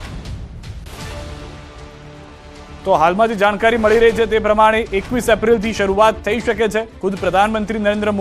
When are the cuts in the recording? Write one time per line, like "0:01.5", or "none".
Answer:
0:07.0